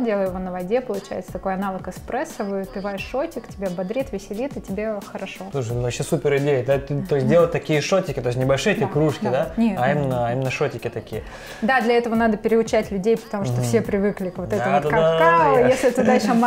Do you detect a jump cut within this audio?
no; 0 cuts

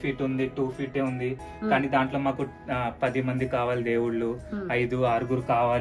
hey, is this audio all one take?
yes; 0 cuts

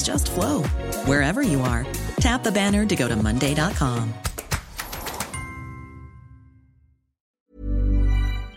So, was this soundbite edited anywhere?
yes; 1 cut; at 7.5 s

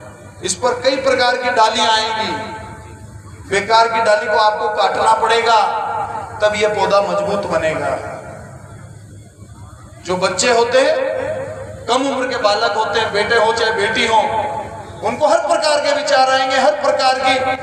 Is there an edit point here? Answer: no; 0 cuts

